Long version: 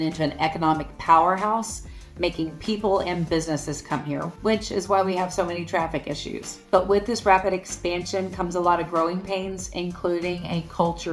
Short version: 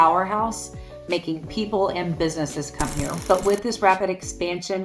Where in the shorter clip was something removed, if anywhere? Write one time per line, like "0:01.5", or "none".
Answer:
0:03.2